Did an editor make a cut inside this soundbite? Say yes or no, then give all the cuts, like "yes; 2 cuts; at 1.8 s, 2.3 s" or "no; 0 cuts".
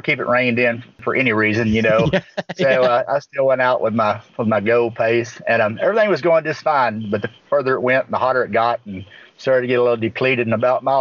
yes; 1 cut; at 1.0 s